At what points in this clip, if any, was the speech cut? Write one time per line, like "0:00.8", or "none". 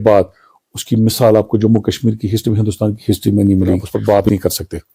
none